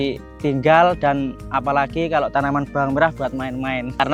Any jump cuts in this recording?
no; 0 cuts

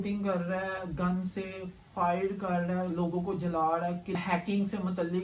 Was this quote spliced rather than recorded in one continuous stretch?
no; 0 cuts

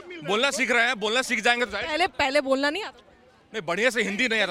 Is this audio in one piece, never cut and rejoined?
yes; 0 cuts

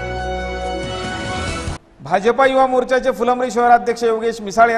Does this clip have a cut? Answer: yes; 1 cut; at 1.7 s

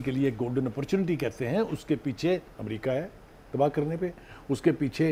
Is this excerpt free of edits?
yes; 0 cuts

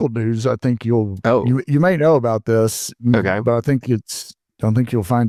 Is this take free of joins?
yes; 0 cuts

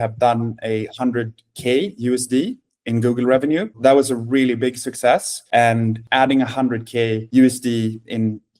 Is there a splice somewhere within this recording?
yes; 2 cuts; at 3.7 s, 6.0 s

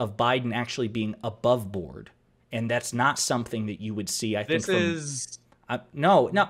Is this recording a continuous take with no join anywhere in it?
yes; 0 cuts

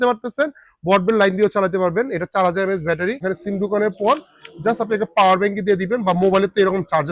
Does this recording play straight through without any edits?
no; 1 cut; at 3.2 s

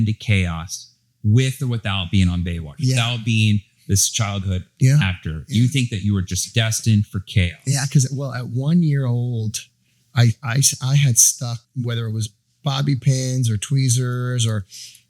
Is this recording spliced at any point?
yes; 1 cut; at 11.6 s

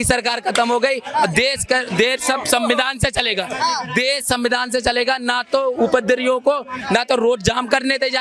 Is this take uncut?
yes; 0 cuts

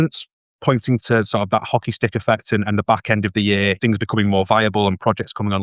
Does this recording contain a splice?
yes; 2 cuts; at 1.0 s, 3.8 s

